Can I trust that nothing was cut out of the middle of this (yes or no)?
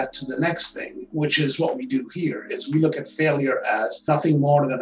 yes